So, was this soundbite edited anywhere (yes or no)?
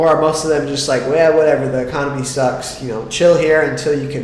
no